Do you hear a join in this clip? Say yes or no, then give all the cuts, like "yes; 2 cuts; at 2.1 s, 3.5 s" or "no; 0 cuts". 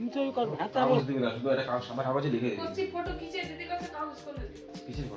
yes; 1 cut; at 1.0 s